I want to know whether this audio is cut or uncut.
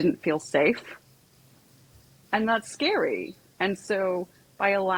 uncut